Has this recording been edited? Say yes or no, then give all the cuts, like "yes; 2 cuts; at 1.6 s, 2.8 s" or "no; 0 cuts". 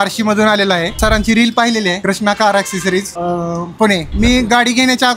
yes; 4 cuts; at 1.0 s, 2.0 s, 3.1 s, 4.1 s